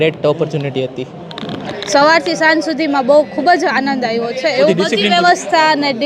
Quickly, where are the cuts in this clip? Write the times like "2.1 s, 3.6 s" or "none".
1.7 s, 4.7 s